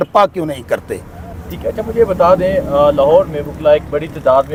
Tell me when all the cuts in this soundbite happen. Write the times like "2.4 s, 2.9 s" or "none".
none